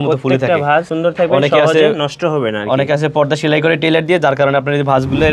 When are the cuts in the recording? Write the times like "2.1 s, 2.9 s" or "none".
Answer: 0.9 s